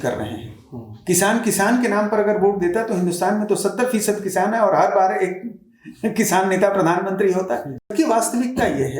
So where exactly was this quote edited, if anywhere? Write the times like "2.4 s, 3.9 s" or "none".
7.9 s